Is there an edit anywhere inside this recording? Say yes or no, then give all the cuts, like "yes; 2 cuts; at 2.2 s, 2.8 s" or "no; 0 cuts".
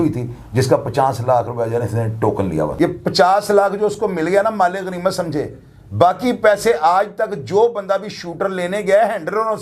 yes; 1 cut; at 2.7 s